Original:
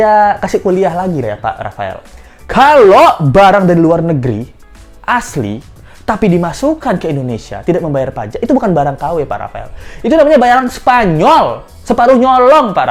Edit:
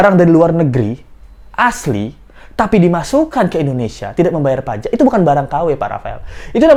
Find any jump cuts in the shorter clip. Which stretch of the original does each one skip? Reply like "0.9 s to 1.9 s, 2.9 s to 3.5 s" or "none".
none